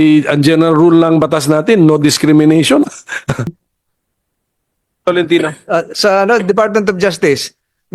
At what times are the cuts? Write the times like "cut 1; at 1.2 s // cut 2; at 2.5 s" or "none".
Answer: cut 1; at 3.6 s